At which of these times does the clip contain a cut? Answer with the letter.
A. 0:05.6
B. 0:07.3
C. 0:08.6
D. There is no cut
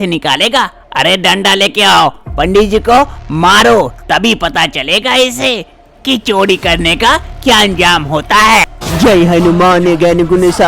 C